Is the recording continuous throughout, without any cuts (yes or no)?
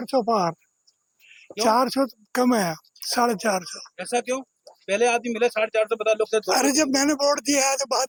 yes